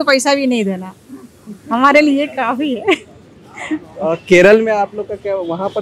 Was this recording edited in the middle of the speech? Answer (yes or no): no